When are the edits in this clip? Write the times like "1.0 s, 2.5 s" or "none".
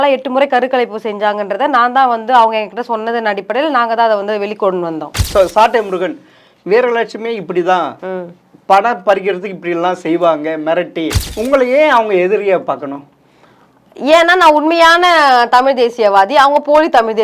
5.2 s, 11.2 s